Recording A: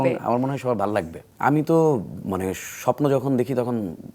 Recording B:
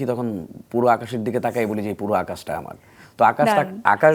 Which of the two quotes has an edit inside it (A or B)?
A